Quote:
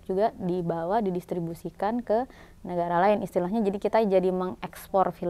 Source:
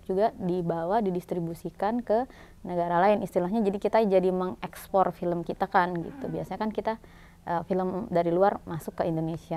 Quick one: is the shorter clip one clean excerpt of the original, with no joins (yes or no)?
yes